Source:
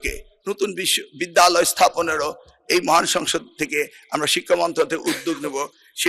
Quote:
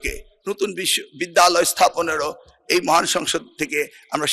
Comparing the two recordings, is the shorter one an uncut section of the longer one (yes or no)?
yes